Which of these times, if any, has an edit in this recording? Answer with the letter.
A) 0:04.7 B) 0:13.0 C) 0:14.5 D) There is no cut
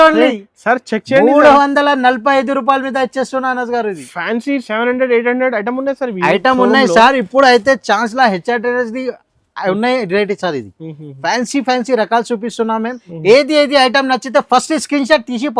B